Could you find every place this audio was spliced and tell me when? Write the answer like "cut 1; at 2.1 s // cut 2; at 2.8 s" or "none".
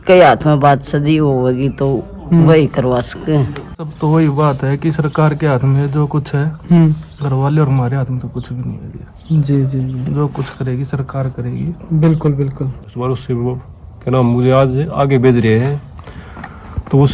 cut 1; at 3.9 s // cut 2; at 12.9 s